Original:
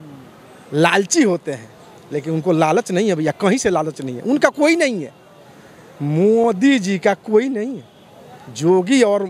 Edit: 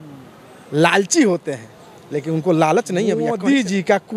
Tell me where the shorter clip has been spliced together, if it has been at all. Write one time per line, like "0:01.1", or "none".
0:03.2